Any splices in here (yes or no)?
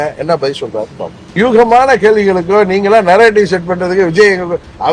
yes